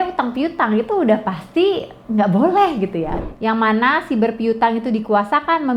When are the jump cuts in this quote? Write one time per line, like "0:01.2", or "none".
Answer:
0:03.2